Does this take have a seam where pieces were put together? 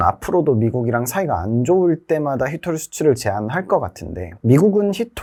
no; 0 cuts

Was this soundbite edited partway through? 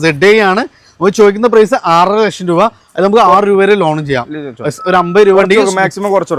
no; 0 cuts

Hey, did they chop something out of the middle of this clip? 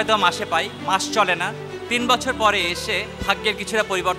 yes; 2 cuts; at 1.8 s, 3.1 s

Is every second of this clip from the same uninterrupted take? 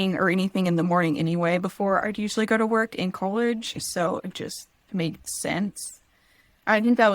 yes; 0 cuts

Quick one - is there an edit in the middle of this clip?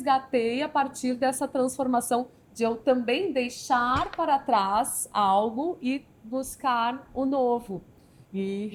no; 0 cuts

